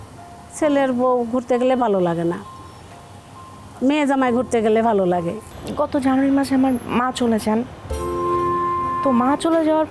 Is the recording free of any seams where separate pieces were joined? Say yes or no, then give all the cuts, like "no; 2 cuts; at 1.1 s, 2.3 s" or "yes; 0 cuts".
no; 1 cut; at 5.4 s